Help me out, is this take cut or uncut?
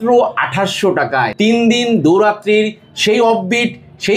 cut